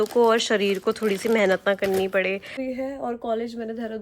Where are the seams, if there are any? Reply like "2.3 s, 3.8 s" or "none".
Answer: 2.6 s